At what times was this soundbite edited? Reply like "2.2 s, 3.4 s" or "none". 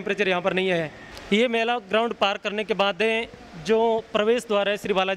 1.1 s